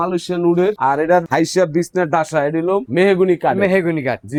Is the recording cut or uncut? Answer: uncut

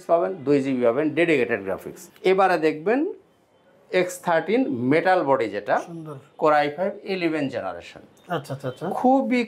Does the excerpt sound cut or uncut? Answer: cut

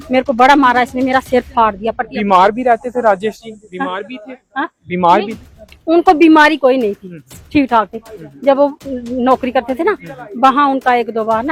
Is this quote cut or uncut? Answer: uncut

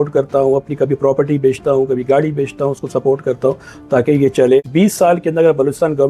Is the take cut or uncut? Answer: cut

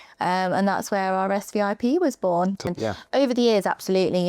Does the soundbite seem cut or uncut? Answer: cut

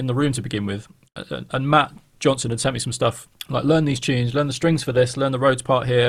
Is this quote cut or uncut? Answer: cut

